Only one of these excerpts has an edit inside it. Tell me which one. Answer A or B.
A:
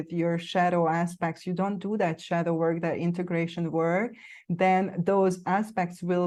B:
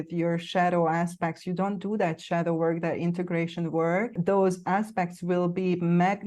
B